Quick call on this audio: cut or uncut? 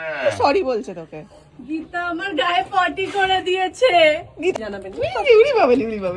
cut